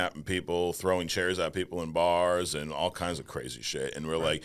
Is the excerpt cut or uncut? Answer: uncut